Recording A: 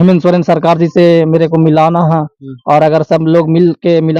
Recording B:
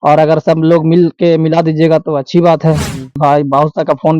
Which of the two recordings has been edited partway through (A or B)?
B